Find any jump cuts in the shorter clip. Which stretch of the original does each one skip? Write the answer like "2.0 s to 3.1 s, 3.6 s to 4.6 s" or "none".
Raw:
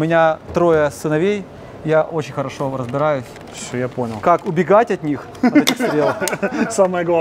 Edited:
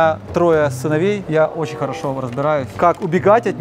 1.4 s to 1.8 s, 3.3 s to 4.2 s